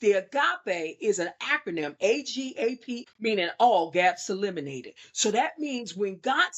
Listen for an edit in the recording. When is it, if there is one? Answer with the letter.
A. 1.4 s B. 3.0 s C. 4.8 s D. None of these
B